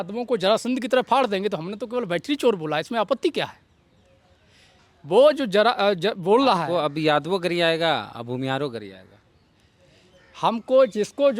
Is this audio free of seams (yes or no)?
yes